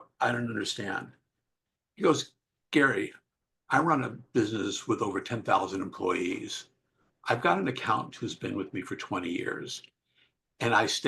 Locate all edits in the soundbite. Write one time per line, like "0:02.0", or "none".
none

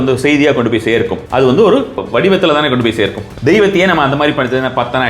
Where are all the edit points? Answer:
0:01.2
0:02.0
0:03.2

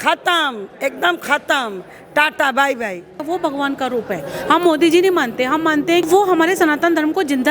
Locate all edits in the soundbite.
0:03.2
0:06.0

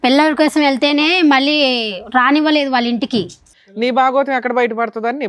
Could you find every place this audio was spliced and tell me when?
0:03.5

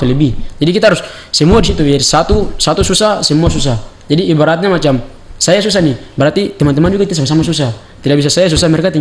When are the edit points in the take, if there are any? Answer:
none

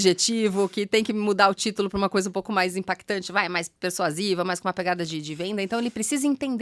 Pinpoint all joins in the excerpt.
none

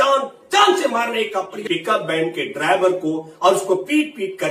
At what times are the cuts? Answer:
0:01.6

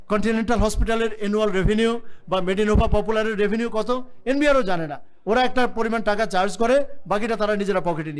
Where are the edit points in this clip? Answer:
none

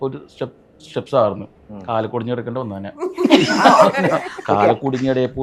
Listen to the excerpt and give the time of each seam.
none

